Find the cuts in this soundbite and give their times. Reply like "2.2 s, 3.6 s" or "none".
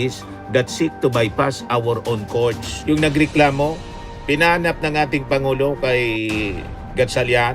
2.7 s